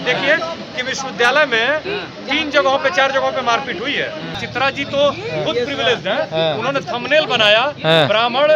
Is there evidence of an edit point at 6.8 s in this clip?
no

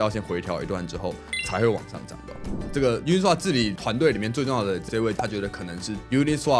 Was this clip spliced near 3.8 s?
yes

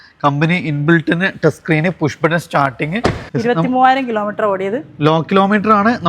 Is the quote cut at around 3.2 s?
yes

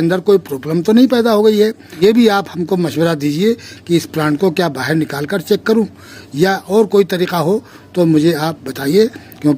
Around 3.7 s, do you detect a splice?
no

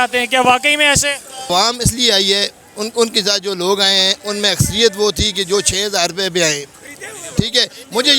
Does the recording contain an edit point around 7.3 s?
no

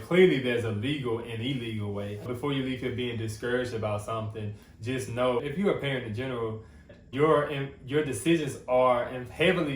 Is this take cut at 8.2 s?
no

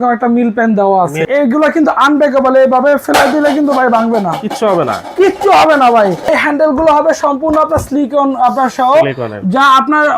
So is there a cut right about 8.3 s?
no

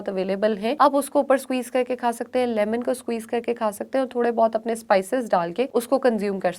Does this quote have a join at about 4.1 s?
no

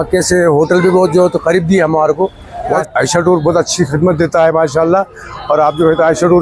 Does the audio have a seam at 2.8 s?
yes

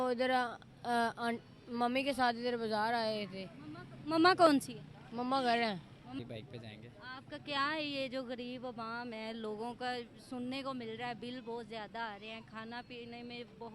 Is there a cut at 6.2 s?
yes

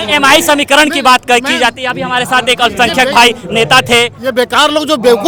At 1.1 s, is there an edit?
no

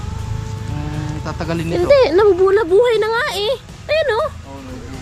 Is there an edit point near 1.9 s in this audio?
no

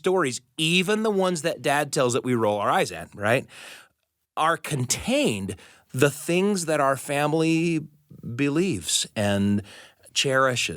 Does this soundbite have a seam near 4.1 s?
no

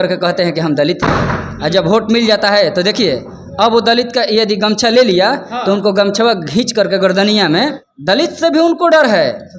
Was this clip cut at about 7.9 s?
yes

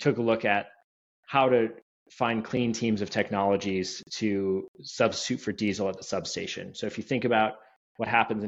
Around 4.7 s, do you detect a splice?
no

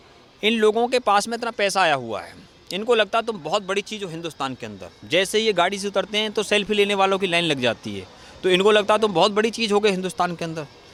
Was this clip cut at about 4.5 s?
no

